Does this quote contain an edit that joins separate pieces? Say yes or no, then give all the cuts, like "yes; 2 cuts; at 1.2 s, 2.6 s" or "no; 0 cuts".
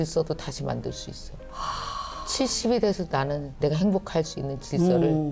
no; 0 cuts